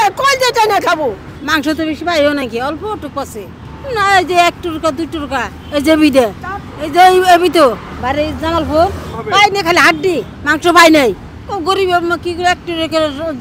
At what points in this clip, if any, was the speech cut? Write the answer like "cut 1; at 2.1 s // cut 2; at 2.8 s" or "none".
none

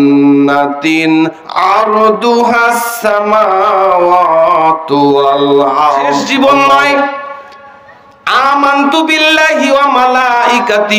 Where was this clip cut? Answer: cut 1; at 6.3 s

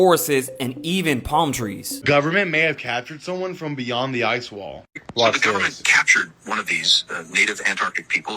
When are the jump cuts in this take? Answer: cut 1; at 1.9 s

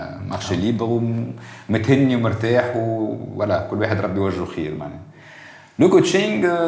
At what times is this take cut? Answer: none

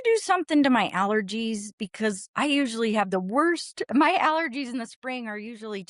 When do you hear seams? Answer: none

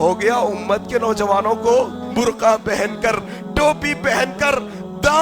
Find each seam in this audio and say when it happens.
cut 1; at 2.0 s

